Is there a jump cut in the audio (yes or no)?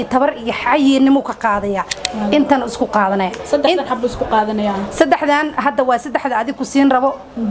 no